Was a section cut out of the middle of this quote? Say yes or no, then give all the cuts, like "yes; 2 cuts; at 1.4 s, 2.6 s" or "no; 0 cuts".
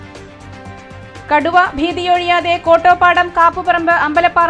no; 0 cuts